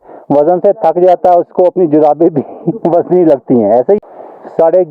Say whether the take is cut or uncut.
cut